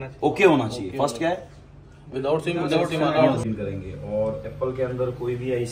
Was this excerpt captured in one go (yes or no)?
no